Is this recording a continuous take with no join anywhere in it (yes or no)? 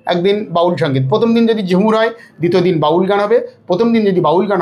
yes